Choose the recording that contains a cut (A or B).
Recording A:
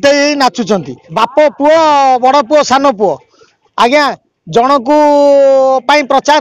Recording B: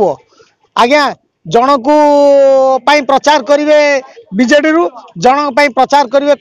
A